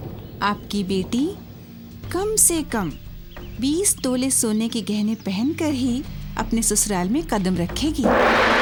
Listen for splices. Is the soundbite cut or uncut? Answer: uncut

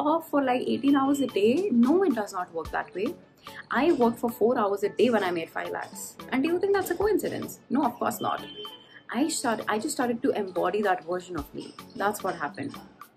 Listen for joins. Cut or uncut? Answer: uncut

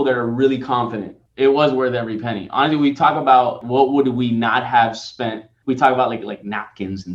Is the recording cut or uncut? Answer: cut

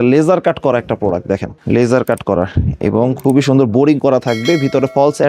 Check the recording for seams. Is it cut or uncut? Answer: cut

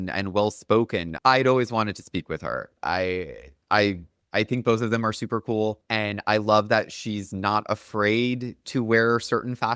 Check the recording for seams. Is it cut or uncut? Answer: cut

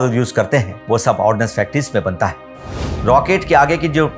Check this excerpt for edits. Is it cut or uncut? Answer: cut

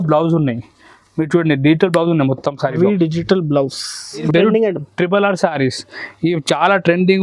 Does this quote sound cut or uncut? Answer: cut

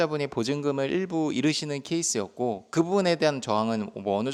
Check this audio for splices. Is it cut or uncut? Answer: uncut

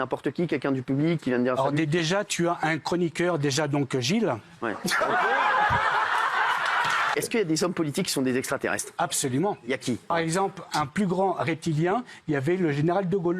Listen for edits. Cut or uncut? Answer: cut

